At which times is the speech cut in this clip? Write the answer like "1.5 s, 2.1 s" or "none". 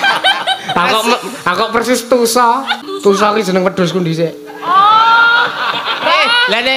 2.8 s